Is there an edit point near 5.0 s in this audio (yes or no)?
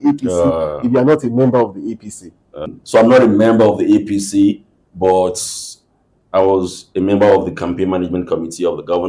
no